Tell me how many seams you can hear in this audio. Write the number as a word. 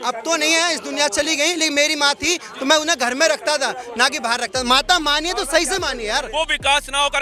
one